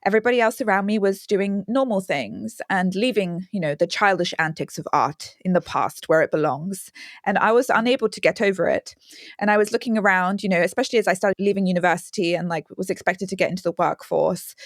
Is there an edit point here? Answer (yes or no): yes